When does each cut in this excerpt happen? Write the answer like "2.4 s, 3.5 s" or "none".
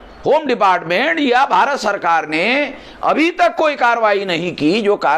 none